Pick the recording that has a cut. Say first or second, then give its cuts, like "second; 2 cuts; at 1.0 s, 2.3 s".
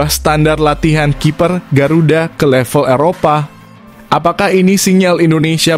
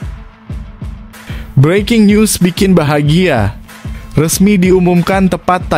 second; 1 cut; at 1.5 s